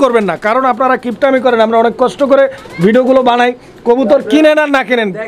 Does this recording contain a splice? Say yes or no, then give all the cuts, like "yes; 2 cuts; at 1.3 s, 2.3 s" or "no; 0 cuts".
no; 0 cuts